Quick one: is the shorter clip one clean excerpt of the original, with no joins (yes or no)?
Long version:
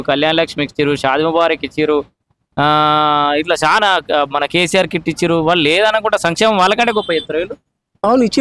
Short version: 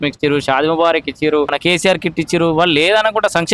no